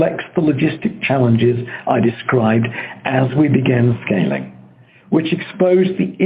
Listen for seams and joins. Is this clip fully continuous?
yes; 0 cuts

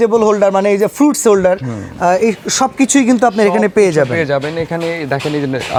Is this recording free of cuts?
yes; 0 cuts

